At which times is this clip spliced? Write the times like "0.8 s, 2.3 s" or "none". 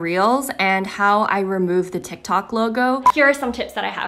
3.1 s